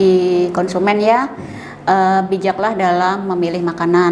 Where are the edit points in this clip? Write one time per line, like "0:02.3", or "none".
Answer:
none